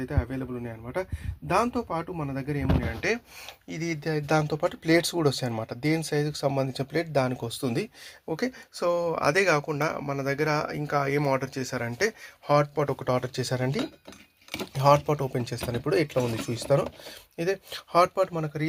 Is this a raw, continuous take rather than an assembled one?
yes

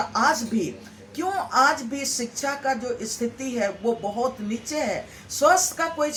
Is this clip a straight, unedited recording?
yes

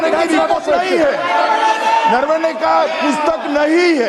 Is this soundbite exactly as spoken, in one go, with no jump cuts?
yes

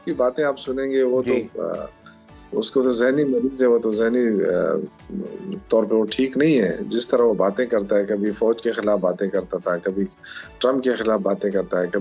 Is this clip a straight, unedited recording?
yes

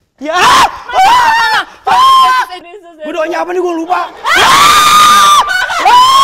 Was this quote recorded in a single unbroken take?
no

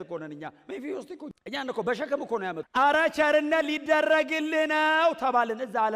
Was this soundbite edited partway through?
yes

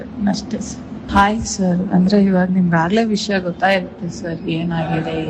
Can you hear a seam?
yes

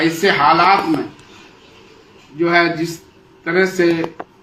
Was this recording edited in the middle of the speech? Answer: no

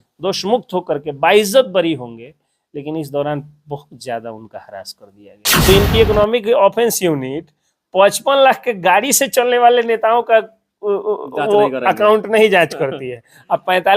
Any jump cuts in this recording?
yes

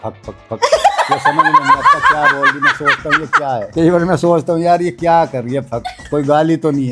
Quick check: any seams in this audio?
no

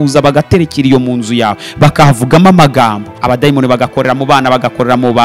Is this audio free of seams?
no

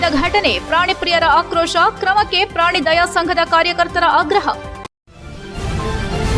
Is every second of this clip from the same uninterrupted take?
no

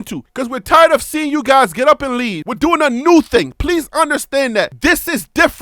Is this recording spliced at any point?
yes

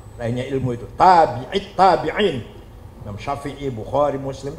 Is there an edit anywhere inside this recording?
no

